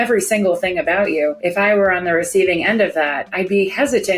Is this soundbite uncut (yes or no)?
no